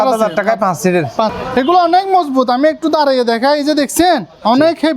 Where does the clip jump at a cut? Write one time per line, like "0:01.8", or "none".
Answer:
0:01.3